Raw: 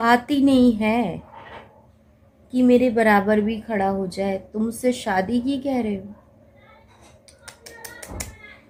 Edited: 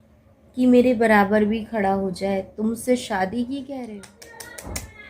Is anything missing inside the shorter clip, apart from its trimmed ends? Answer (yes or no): yes